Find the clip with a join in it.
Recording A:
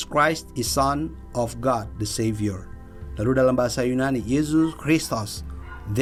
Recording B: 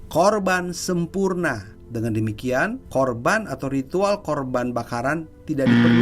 B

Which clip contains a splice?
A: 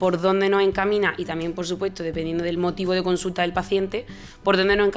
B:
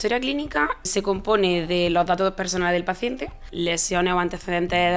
B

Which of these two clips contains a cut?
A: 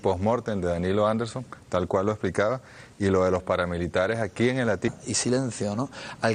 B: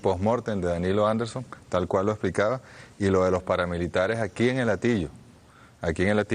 B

